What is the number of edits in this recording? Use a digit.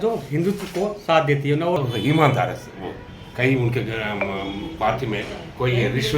1